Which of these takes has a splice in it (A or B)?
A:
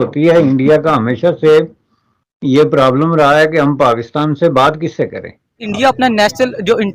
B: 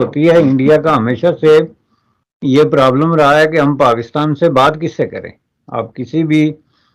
A